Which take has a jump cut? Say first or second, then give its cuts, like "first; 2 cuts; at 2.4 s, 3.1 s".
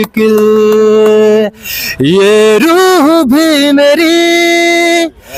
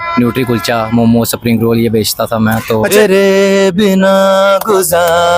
second; 1 cut; at 2.9 s